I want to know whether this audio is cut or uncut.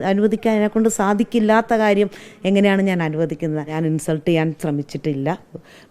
cut